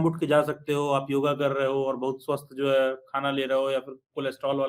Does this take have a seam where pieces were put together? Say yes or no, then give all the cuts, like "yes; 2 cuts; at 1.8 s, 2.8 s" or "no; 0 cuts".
no; 0 cuts